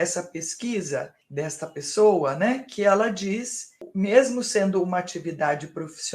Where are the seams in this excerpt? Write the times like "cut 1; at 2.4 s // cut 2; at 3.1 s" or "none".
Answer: cut 1; at 1.2 s // cut 2; at 3.8 s